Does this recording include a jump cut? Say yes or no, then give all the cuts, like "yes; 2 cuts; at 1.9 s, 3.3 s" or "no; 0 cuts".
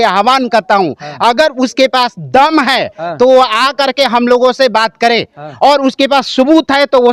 no; 0 cuts